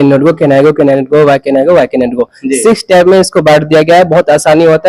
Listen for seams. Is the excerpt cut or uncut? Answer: uncut